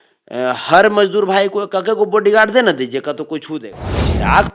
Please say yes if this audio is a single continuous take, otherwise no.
no